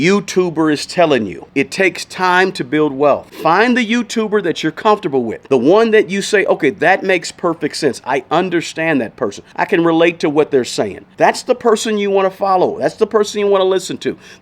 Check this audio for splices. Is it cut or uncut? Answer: cut